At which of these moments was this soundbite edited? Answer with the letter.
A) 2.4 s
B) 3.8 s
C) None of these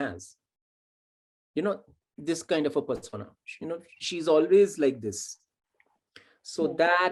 C